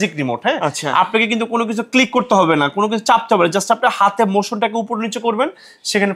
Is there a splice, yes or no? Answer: no